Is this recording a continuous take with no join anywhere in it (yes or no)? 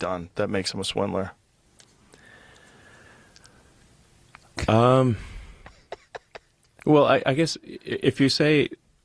yes